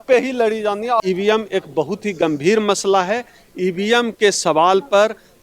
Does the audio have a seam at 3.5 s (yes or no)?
no